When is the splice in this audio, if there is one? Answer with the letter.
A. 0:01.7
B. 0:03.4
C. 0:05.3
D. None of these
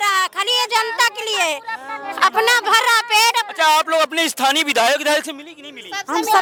D